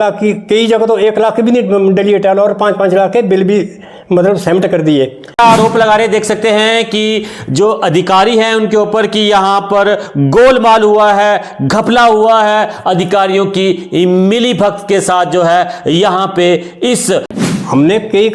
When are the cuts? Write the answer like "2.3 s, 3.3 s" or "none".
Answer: 5.4 s, 17.3 s